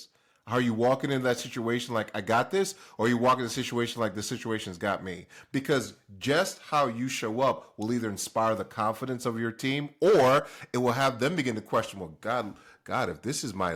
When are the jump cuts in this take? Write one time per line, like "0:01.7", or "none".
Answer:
none